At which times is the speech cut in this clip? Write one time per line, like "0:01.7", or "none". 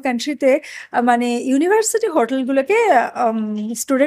none